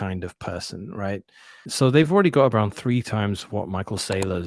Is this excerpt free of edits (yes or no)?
no